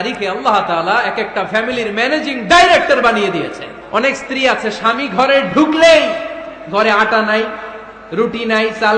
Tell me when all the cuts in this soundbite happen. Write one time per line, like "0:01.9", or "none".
0:03.7